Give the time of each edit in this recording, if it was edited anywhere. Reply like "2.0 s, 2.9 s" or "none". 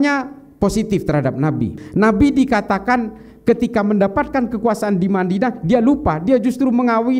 1.7 s